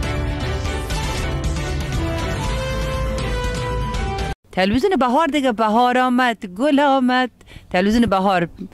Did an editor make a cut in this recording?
yes; 1 cut; at 4.4 s

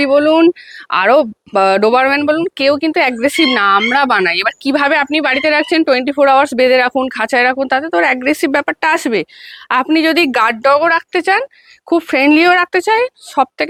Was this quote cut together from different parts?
no; 0 cuts

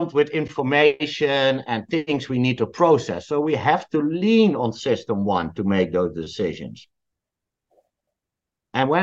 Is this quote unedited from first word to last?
yes; 0 cuts

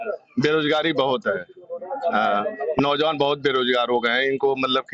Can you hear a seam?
no; 0 cuts

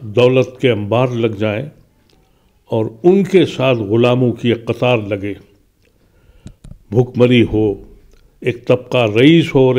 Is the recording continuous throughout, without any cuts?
yes; 0 cuts

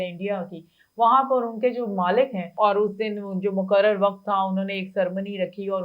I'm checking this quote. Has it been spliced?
yes; 1 cut; at 2.5 s

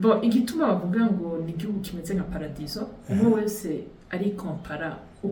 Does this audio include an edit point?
no; 0 cuts

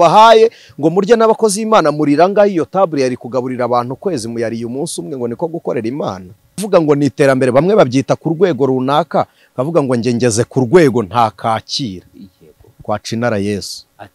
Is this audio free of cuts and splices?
no; 1 cut; at 6.5 s

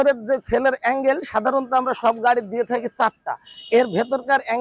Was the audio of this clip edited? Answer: no; 0 cuts

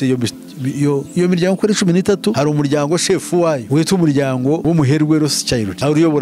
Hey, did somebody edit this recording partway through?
no; 0 cuts

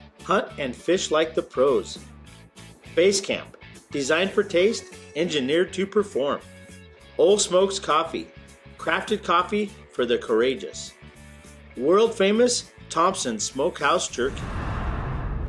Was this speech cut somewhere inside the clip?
yes; 1 cut; at 14.5 s

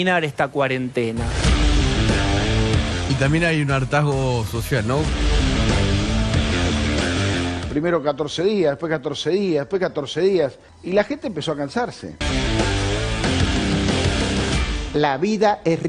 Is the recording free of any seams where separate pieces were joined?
no; 5 cuts; at 3.1 s, 5.1 s, 7.6 s, 12.1 s, 14.7 s

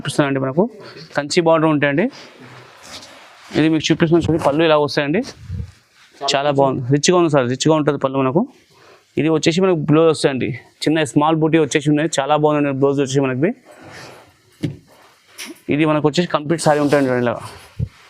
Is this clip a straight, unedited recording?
yes; 0 cuts

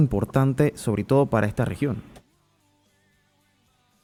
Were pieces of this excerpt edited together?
no; 0 cuts

